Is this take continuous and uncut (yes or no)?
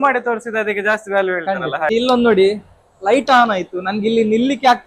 no